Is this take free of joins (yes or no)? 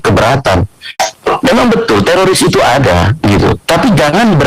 no